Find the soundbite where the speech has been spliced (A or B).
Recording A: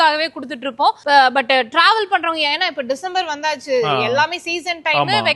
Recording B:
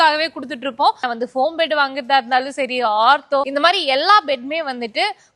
B